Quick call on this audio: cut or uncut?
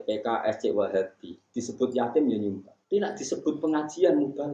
cut